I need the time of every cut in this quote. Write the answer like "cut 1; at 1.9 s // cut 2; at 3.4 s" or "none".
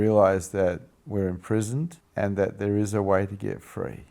cut 1; at 2.0 s